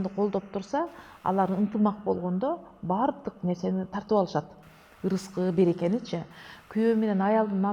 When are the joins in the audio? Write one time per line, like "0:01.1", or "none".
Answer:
none